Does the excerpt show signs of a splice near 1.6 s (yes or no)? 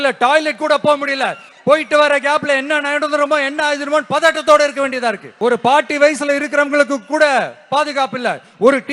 no